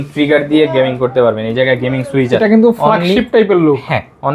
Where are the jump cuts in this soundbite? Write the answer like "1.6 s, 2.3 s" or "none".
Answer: 2.3 s